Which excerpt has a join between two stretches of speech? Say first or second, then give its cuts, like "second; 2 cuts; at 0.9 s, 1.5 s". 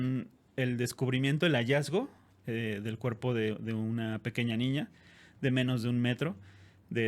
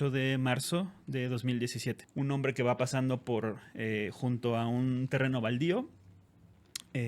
second; 1 cut; at 2.0 s